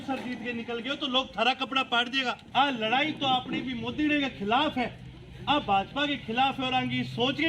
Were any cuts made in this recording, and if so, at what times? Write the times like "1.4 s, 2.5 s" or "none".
2.4 s